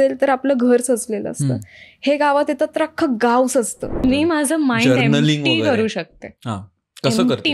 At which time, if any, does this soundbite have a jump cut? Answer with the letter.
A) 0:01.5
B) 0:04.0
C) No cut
B